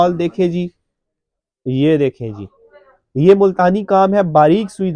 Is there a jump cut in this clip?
no; 0 cuts

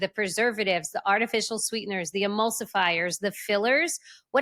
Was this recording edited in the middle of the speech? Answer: no; 0 cuts

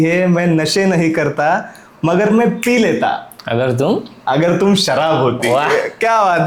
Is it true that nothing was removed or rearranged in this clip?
yes; 0 cuts

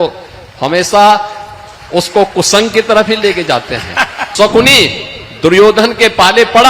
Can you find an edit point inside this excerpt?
yes; 1 cut; at 4.2 s

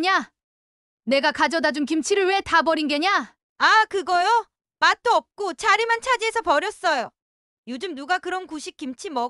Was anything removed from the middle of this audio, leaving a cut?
yes; 1 cut; at 3.4 s

